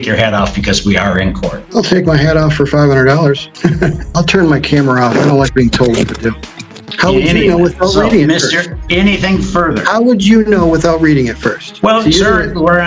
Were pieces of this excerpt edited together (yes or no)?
yes